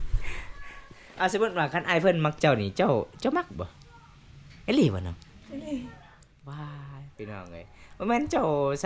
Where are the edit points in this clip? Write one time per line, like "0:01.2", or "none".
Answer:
none